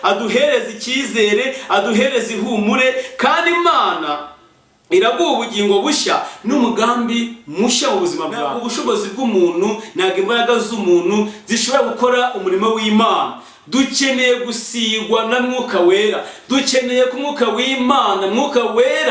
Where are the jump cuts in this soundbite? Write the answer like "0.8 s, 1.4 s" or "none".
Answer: 8.6 s